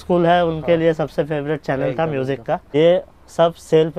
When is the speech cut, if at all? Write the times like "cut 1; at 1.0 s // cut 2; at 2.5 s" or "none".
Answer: cut 1; at 2.7 s